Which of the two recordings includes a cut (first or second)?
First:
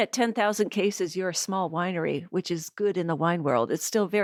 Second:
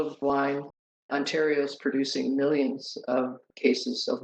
second